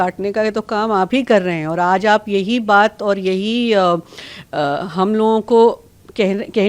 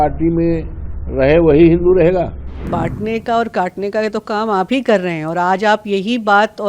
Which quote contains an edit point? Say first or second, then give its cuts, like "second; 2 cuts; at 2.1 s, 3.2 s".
second; 1 cut; at 2.7 s